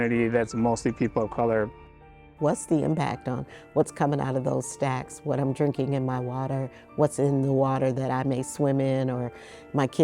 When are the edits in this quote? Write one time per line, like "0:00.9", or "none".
0:02.3